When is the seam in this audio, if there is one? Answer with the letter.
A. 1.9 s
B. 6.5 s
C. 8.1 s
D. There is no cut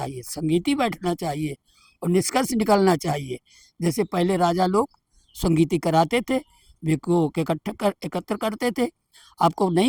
D